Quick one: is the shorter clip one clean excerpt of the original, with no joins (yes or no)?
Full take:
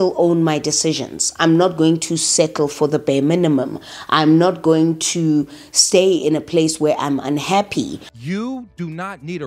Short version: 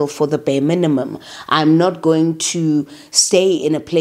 yes